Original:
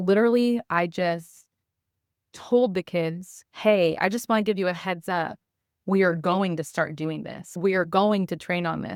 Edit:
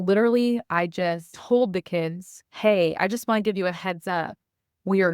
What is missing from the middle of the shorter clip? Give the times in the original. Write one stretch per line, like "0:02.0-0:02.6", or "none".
0:01.3-0:02.3